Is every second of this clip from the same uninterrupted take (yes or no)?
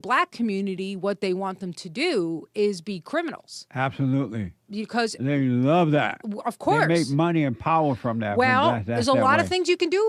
yes